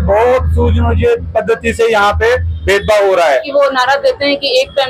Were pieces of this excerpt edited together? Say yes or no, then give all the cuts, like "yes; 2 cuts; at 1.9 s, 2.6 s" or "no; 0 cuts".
yes; 1 cut; at 3.4 s